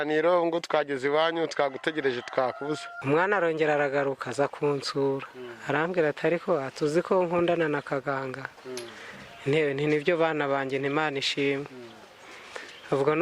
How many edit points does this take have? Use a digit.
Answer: 1